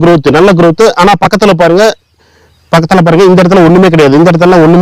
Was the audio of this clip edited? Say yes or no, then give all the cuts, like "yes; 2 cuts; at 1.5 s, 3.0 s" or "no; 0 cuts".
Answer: no; 0 cuts